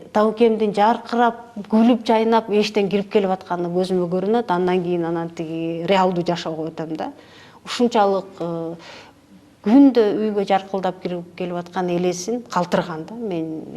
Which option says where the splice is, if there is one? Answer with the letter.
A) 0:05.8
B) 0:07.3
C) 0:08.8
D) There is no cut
D